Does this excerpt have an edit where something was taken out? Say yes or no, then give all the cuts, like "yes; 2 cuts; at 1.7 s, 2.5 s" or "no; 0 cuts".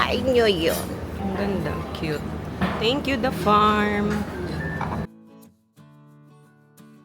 no; 0 cuts